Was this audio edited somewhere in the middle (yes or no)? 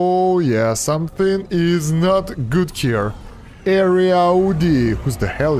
no